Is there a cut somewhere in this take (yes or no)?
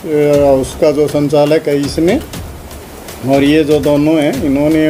no